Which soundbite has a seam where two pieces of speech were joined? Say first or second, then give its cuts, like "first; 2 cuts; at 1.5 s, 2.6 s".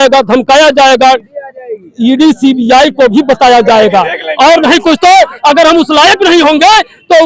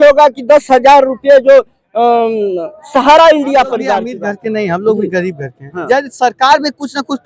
second; 1 cut; at 4.1 s